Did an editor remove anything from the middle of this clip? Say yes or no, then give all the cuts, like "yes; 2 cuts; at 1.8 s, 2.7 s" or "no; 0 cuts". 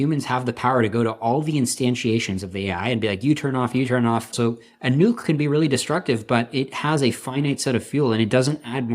yes; 1 cut; at 4.3 s